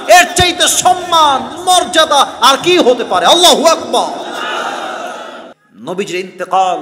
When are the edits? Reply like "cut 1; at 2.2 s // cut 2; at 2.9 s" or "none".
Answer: cut 1; at 5.5 s